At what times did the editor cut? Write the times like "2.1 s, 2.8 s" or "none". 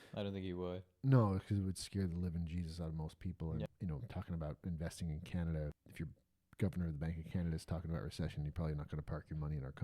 3.7 s, 5.8 s